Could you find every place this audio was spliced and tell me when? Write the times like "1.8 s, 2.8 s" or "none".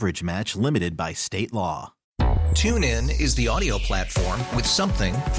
2.0 s